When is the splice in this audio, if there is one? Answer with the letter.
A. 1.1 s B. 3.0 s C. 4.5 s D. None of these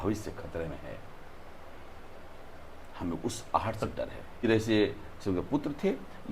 C